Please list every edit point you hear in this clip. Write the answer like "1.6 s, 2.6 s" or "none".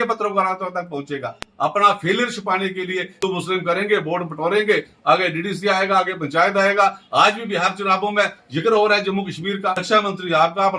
3.2 s, 9.8 s